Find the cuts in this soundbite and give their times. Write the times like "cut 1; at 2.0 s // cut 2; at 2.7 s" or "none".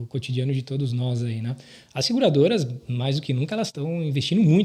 cut 1; at 3.7 s